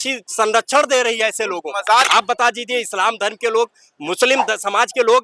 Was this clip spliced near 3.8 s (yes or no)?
no